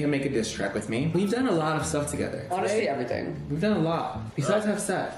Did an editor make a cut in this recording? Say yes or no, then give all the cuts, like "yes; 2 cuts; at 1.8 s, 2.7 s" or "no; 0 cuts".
no; 0 cuts